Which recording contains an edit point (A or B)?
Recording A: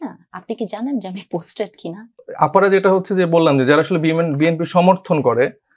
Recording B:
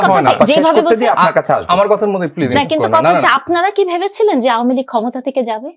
A